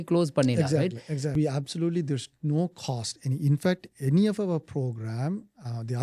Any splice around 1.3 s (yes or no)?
yes